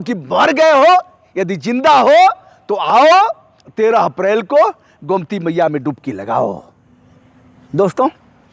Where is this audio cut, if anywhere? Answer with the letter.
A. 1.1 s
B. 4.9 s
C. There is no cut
C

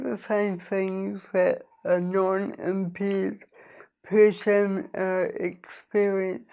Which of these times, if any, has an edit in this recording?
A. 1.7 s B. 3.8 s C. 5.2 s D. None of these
D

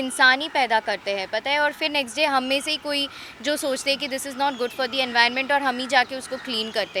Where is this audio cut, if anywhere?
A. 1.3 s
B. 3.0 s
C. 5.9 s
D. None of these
D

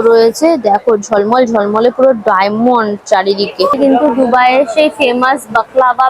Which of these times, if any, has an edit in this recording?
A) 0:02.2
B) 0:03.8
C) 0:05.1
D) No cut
B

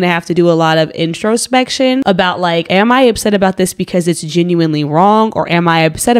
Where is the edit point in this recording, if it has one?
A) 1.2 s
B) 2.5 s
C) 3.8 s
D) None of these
B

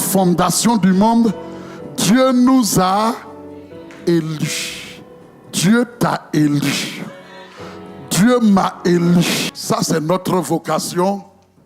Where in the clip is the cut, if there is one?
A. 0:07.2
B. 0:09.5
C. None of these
B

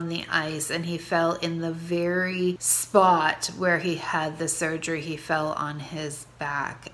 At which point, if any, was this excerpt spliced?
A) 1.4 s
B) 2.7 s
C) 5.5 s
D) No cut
B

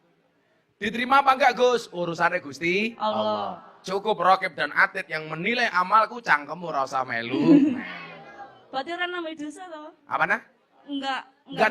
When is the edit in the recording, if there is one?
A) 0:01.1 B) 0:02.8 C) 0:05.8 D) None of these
D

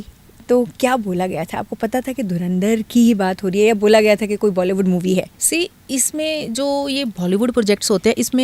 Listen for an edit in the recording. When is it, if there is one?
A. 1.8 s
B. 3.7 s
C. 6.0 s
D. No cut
D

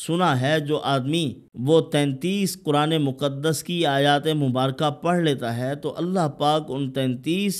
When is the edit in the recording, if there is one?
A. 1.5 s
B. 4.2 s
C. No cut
A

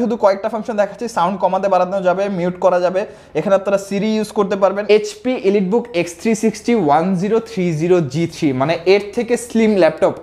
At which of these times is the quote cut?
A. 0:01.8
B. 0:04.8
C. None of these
B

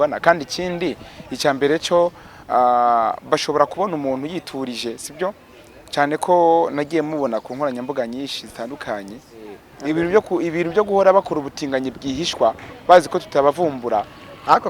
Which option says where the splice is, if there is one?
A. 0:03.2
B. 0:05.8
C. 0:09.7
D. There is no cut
C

